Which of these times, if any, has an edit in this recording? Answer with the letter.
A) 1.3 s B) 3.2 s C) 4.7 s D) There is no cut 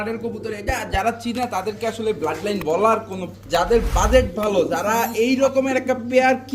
B